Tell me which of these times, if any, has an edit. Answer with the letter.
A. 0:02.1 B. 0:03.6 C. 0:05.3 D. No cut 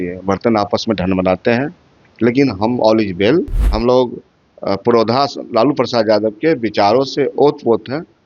B